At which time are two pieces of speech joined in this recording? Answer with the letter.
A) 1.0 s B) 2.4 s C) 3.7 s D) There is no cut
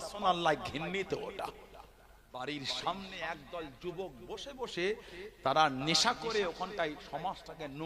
B